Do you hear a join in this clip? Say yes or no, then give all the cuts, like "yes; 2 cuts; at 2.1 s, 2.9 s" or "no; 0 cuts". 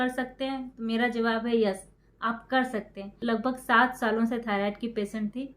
yes; 1 cut; at 3.1 s